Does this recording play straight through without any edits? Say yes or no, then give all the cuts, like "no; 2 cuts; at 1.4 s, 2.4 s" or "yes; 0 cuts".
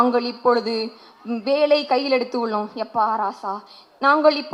yes; 0 cuts